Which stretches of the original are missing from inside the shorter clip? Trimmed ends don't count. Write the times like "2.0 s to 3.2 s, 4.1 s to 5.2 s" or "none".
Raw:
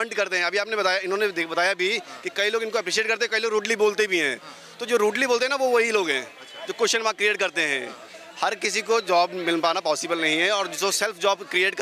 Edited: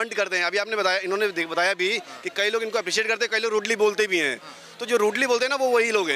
none